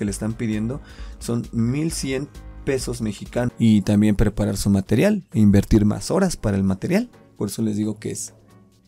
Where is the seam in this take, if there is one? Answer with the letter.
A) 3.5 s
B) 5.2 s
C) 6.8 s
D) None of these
A